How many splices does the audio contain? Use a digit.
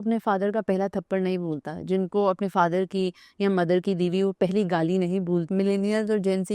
1